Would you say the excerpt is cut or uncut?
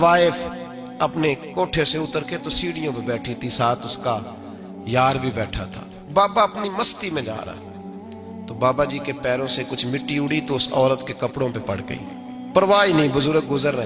uncut